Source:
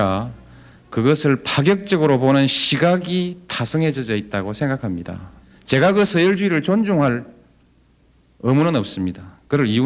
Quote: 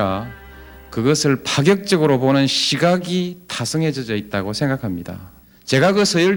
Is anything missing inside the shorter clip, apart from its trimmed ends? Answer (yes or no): no